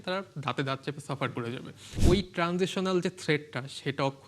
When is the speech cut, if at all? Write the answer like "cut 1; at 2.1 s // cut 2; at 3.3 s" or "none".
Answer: cut 1; at 2.0 s